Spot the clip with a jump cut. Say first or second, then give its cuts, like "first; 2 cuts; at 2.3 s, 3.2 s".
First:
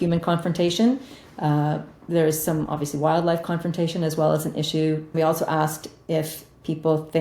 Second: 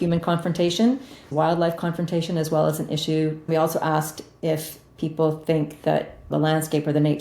second; 2 cuts; at 1.2 s, 6.3 s